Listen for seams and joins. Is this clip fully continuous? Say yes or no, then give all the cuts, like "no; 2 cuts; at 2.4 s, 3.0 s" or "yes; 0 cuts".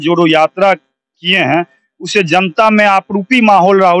yes; 0 cuts